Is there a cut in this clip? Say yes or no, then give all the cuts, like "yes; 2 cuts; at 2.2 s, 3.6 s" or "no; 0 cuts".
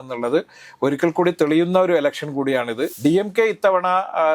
yes; 1 cut; at 2.9 s